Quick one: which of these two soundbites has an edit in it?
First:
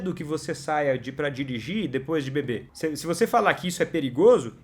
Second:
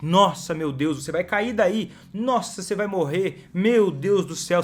first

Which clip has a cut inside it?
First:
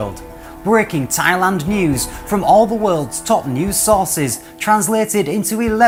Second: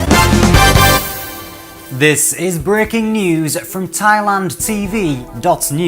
second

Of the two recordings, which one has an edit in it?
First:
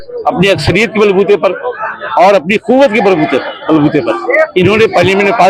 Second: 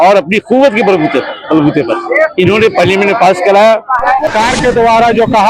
second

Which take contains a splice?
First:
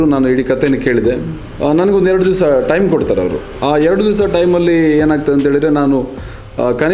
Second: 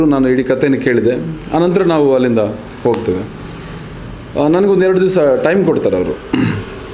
first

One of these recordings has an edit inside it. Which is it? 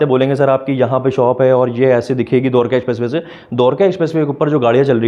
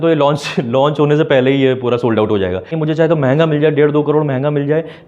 second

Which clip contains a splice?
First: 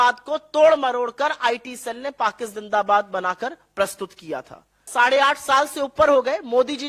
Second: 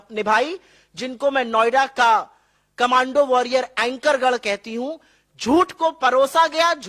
first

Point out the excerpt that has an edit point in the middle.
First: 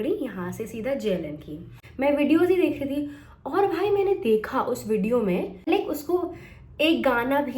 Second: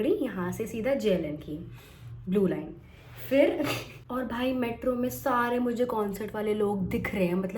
first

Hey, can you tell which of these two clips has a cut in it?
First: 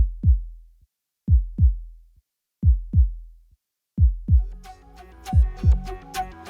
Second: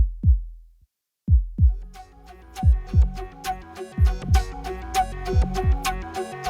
second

